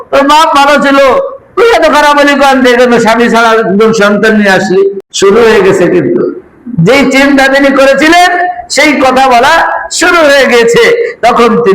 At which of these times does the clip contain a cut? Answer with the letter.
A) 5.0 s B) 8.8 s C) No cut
A